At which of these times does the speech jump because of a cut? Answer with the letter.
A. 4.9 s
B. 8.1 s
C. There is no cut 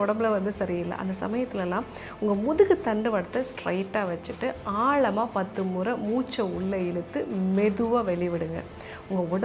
C